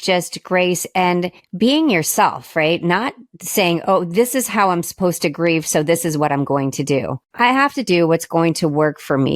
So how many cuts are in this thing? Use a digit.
2